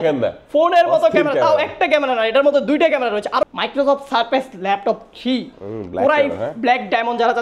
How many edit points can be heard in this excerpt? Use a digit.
1